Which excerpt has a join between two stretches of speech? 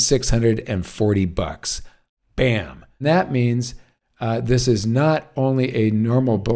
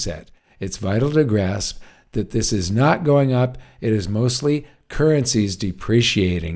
first; 1 cut; at 3.0 s

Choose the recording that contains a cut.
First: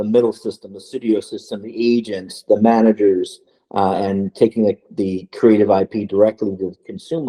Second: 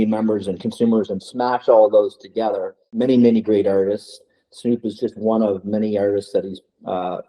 second; 1 cut; at 3.0 s

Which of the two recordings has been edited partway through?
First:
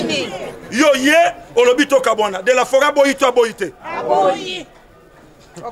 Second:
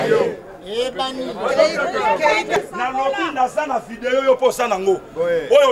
second; 1 cut; at 2.6 s

